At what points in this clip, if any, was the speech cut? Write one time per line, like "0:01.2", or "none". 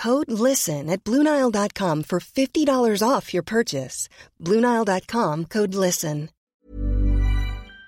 0:06.5